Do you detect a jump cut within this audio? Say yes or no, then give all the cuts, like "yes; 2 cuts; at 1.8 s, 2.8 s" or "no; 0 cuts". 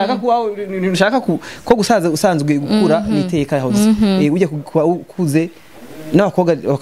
no; 0 cuts